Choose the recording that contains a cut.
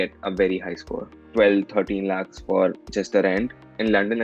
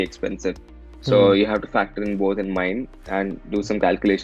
first; 1 cut; at 1.2 s

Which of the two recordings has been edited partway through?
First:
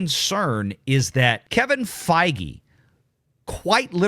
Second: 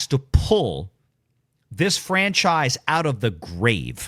first; 1 cut; at 1.4 s

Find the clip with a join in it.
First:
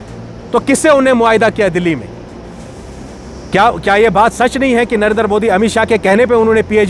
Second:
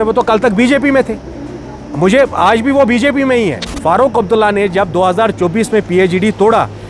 second; 1 cut; at 3.7 s

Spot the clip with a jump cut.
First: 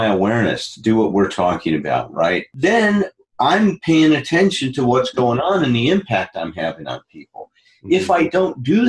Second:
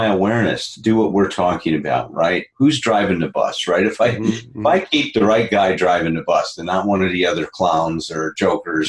first; 1 cut; at 2.5 s

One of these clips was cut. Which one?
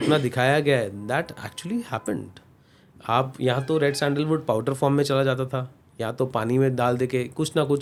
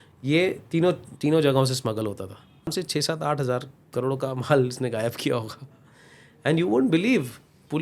second; 1 cut; at 2.7 s

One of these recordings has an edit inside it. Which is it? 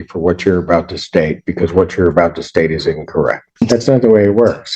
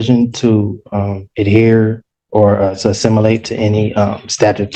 first; 1 cut; at 3.5 s

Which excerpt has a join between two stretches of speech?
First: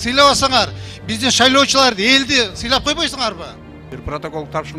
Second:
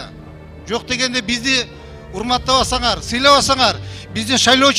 first; 1 cut; at 3.9 s

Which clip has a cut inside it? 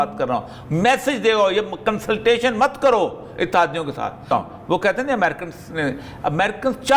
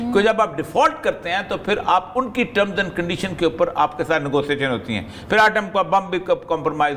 first; 1 cut; at 4.3 s

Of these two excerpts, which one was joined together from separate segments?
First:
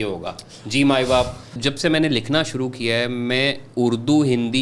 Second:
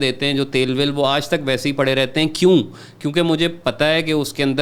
first; 1 cut; at 1.4 s

